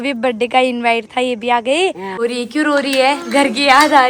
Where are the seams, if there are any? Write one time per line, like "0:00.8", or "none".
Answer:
0:02.2

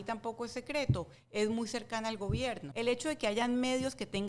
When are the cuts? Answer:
0:02.7

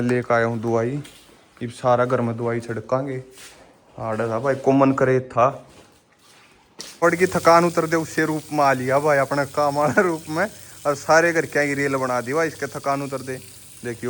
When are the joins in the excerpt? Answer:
0:06.9

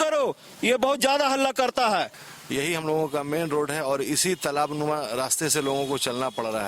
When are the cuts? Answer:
0:02.2

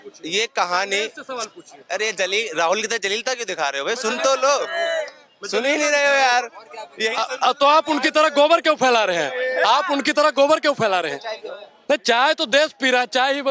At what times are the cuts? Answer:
none

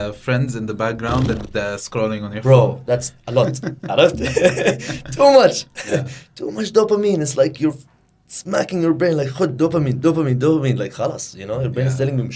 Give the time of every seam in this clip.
none

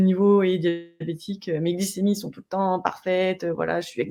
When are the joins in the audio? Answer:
none

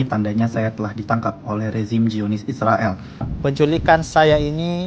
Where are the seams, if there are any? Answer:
0:03.3

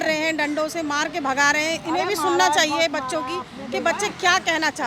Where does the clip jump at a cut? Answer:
none

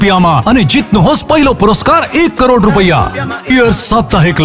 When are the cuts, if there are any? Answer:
0:03.5

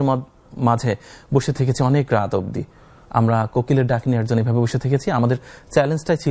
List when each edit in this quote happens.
none

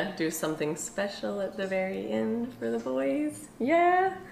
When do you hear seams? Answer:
none

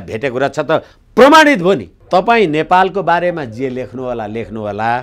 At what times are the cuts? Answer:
0:01.9

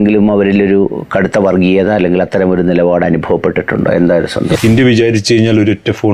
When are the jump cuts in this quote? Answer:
0:04.5

